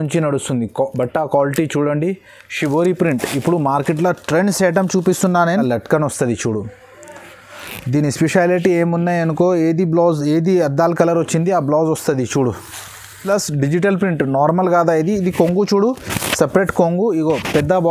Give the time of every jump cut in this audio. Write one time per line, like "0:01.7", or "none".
0:05.6
0:13.2